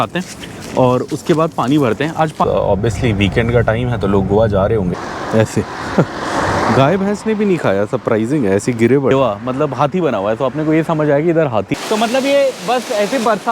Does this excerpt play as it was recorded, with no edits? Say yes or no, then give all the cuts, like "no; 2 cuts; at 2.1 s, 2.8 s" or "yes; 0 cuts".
no; 4 cuts; at 2.5 s, 5.0 s, 9.1 s, 11.7 s